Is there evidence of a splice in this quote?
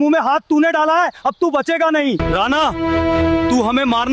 yes; 1 cut; at 2.2 s

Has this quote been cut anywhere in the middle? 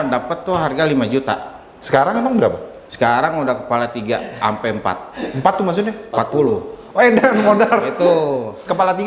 no; 0 cuts

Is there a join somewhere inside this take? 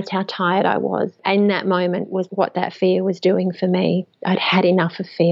yes; 2 cuts; at 1.2 s, 2.3 s

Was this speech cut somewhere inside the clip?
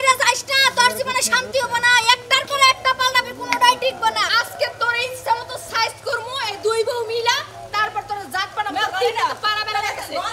yes; 1 cut; at 4.3 s

